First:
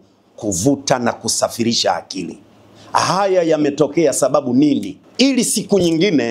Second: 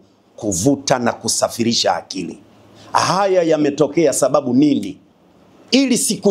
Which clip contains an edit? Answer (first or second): first